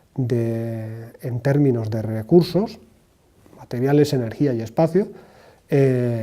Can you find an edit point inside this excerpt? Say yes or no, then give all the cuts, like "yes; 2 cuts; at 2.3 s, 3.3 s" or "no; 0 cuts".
yes; 1 cut; at 1.4 s